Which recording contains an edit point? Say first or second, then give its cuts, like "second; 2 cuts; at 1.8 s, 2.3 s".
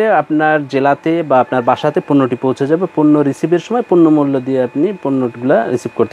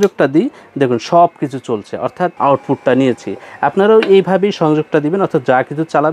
second; 1 cut; at 2.3 s